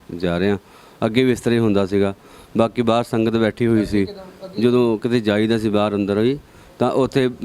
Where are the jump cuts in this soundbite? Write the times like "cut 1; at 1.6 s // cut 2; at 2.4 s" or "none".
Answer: none

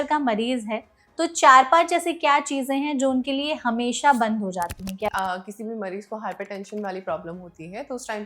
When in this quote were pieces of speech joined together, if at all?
cut 1; at 5.1 s

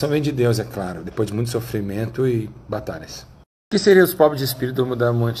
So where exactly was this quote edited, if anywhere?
none

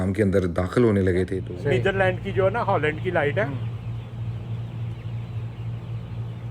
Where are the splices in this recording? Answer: cut 1; at 1.4 s

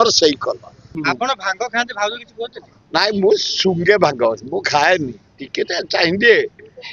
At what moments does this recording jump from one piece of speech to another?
cut 1; at 1.0 s

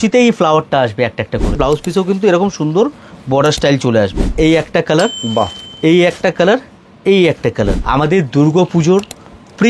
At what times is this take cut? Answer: cut 1; at 1.6 s // cut 2; at 4.3 s // cut 3; at 7.8 s

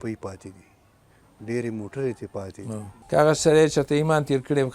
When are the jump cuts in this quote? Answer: cut 1; at 2.9 s

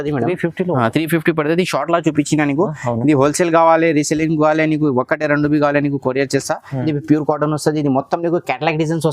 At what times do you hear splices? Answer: cut 1; at 6.9 s

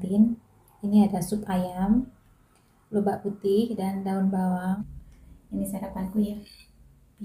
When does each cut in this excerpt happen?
cut 1; at 4.8 s

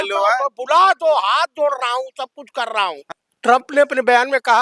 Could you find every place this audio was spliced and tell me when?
cut 1; at 3.0 s

